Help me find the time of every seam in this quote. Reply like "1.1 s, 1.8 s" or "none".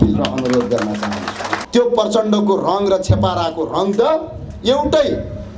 1.5 s